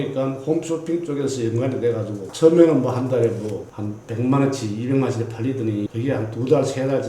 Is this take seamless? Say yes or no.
no